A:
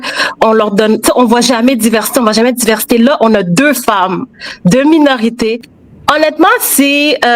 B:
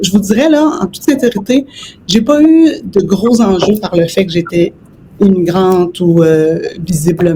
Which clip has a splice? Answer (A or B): A